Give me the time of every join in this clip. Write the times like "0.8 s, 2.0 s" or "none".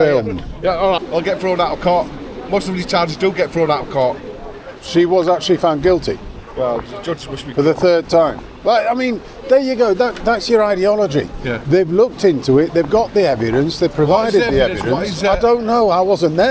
1.0 s